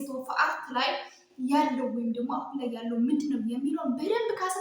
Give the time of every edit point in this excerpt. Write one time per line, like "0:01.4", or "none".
none